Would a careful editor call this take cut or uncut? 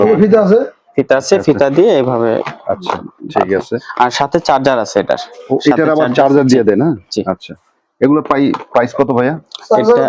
uncut